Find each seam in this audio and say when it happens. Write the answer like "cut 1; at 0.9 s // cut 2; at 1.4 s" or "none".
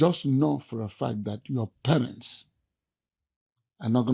none